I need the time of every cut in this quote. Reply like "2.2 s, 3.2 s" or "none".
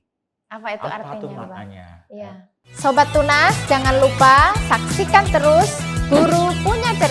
2.7 s